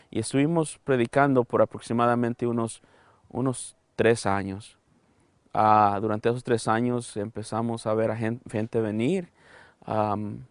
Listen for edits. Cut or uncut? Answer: uncut